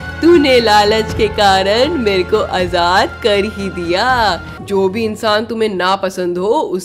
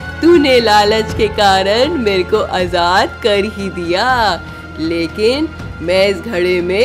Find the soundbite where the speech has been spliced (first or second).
first